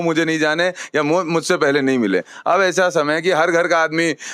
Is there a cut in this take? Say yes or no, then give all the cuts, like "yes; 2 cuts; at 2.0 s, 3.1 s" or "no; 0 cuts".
yes; 1 cut; at 2.3 s